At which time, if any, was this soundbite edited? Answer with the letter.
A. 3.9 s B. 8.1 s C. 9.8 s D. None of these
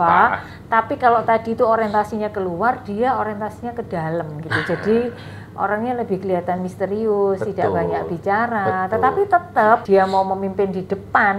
C